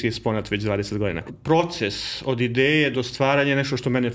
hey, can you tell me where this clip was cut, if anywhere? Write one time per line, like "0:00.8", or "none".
0:01.3

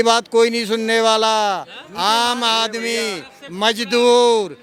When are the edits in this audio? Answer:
none

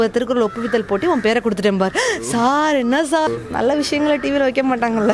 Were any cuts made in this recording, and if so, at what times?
0:03.3

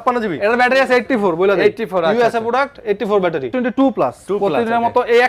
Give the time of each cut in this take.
0:03.5

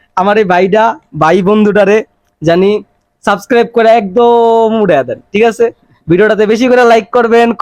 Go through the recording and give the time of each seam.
none

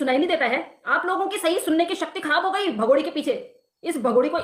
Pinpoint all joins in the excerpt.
none

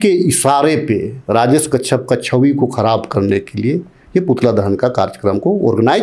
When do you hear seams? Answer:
none

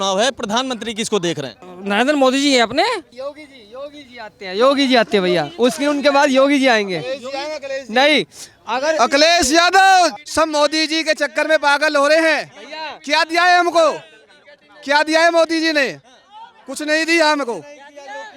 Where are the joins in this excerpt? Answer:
0:01.6
0:03.1
0:10.2

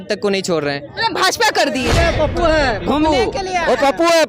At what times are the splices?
0:01.9

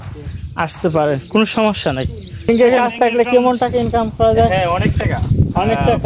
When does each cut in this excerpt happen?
0:02.5

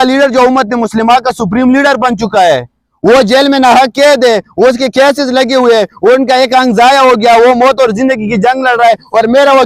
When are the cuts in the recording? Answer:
none

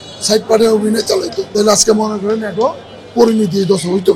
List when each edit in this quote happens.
0:01.4

